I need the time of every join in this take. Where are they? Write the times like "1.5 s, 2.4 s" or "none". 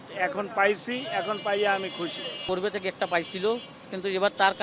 2.4 s